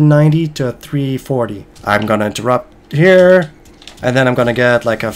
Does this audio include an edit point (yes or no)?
yes